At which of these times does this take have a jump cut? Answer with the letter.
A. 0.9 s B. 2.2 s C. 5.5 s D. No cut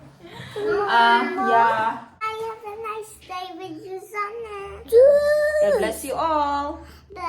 B